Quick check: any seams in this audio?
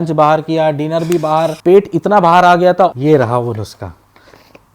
yes; 2 cuts; at 1.6 s, 2.9 s

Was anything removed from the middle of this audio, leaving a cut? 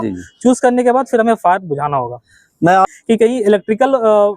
yes; 1 cut; at 2.9 s

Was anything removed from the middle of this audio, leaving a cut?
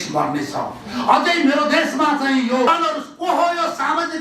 yes; 1 cut; at 2.7 s

